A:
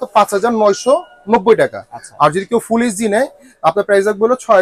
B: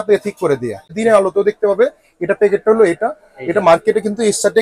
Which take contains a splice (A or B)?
B